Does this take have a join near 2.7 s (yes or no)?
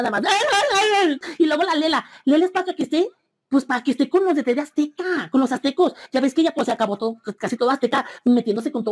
no